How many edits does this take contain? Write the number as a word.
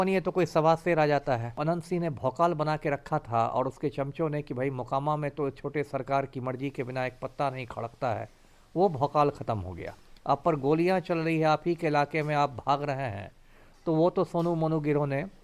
one